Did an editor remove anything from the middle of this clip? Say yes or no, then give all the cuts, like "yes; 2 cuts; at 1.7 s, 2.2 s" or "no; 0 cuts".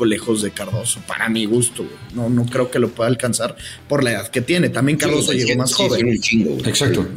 no; 0 cuts